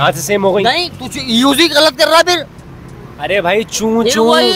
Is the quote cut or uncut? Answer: uncut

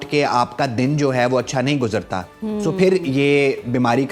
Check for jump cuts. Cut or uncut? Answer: uncut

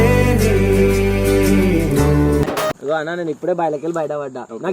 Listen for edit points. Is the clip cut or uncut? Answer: cut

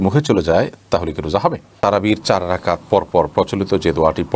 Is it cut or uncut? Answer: cut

